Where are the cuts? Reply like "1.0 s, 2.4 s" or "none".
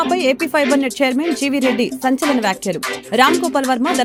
none